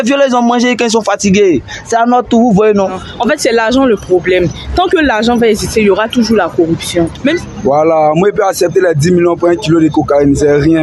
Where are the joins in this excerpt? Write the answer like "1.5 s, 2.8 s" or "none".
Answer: 3.1 s, 7.2 s